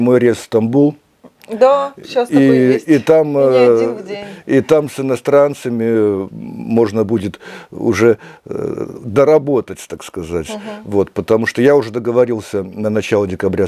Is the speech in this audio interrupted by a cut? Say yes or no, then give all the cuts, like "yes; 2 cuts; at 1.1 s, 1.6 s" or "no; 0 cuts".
no; 0 cuts